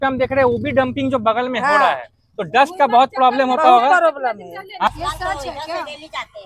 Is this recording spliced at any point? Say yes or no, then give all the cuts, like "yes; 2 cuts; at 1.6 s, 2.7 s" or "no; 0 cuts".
yes; 1 cut; at 4.9 s